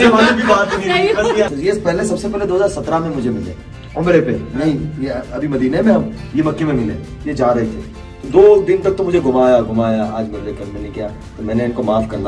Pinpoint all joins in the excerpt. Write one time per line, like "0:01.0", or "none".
0:01.5